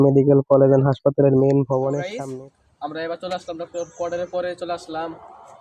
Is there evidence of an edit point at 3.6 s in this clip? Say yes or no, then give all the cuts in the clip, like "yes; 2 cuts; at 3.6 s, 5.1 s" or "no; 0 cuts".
no; 1 cut; at 2.1 s